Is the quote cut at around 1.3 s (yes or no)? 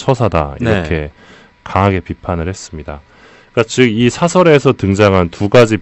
no